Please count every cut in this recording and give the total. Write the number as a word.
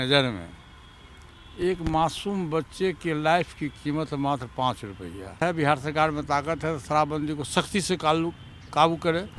one